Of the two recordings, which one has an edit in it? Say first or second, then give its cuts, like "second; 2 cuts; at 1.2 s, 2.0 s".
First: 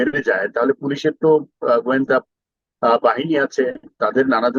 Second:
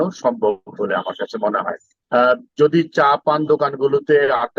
second; 1 cut; at 1.9 s